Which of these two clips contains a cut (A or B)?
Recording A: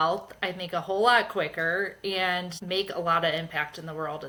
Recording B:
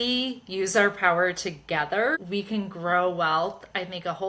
B